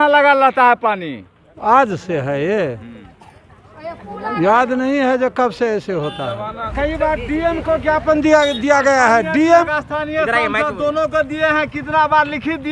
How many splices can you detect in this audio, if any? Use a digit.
3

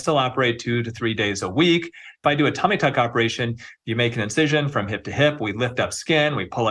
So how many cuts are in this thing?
1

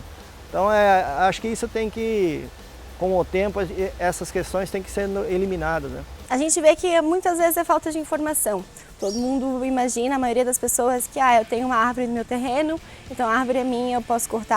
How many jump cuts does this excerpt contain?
1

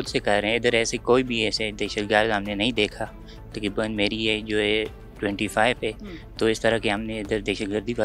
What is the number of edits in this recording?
0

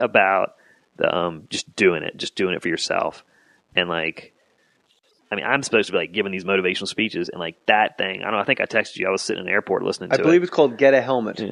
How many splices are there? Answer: 1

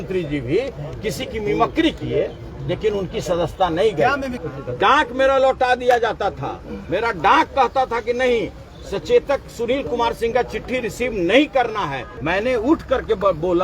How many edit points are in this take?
2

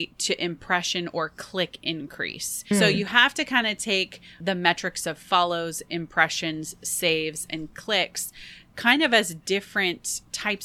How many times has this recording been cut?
2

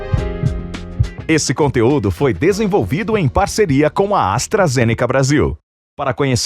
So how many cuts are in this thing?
1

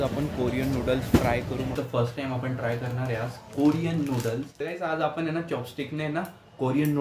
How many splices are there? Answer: 2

